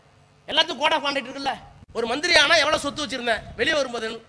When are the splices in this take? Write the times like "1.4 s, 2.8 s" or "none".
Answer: 1.7 s